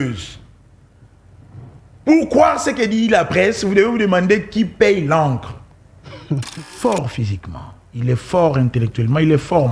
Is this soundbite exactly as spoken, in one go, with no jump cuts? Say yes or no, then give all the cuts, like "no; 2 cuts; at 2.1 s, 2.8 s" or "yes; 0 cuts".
no; 1 cut; at 6.7 s